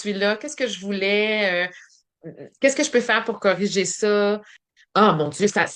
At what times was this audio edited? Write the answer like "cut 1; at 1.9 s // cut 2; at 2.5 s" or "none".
cut 1; at 4.6 s